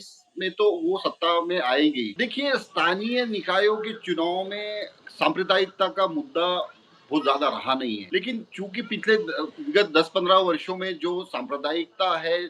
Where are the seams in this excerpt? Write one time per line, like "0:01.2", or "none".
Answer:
0:02.1
0:08.0

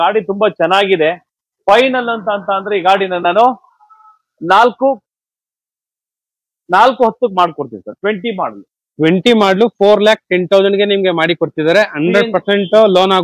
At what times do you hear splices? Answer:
none

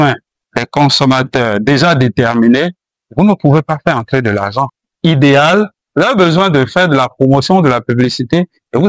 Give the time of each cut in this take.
0:04.8

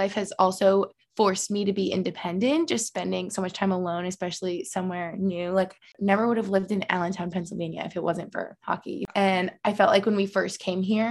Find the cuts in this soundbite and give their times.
0:05.9
0:09.0

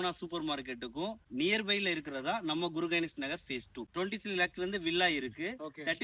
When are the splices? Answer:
0:03.8

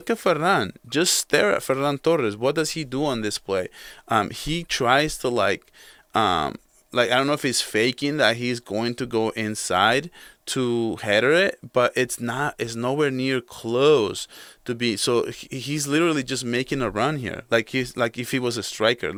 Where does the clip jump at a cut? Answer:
none

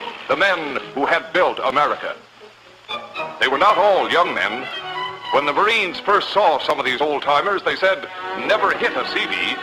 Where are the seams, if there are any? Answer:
none

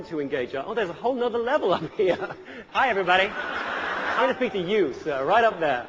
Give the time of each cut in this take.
0:02.6
0:04.1

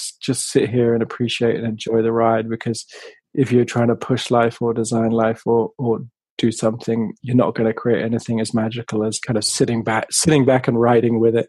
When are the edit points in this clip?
0:09.2

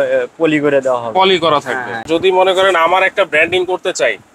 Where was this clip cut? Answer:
0:02.1

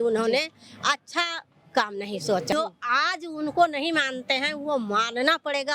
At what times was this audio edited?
0:02.5

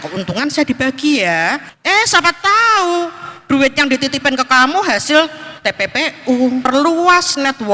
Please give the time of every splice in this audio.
0:01.7
0:06.7

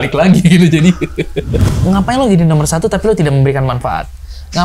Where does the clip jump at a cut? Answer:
0:01.6

